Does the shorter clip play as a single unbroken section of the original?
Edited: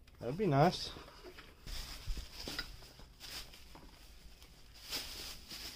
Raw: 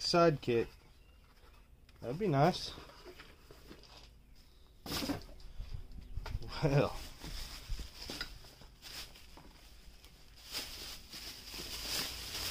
no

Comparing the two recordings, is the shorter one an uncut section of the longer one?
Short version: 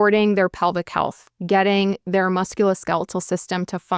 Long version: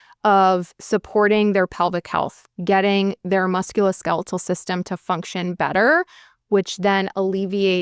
yes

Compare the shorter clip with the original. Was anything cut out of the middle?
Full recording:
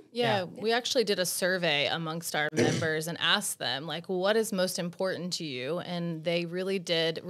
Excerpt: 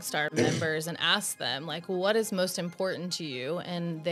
no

